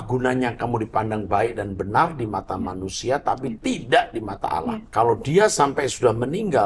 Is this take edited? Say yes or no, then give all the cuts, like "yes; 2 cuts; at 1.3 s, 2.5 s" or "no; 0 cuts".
yes; 1 cut; at 4.8 s